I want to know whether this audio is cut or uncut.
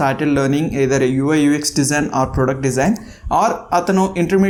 uncut